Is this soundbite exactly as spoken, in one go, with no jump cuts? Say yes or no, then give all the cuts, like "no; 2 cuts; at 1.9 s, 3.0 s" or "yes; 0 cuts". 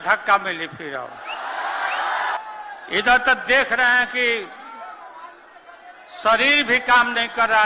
no; 1 cut; at 2.4 s